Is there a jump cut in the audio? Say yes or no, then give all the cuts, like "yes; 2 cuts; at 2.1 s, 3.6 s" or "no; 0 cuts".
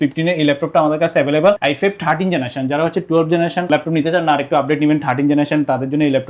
no; 0 cuts